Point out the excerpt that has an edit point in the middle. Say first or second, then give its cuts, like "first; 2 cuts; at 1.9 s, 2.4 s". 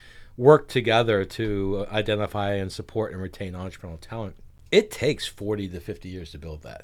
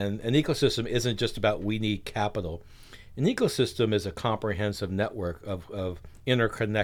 first; 1 cut; at 4.5 s